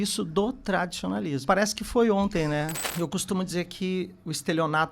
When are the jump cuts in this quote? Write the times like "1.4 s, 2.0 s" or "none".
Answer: 1.4 s, 2.8 s